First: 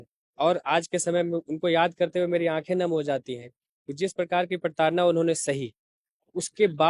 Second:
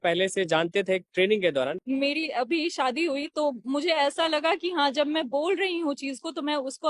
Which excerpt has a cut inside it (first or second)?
second